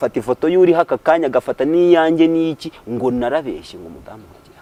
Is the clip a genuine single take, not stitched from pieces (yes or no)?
yes